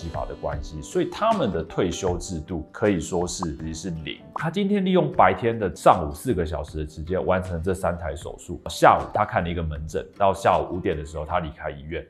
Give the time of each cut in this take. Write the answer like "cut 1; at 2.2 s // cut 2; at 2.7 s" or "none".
cut 1; at 4.3 s